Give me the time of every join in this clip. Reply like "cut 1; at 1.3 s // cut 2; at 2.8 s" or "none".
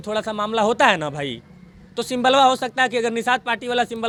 none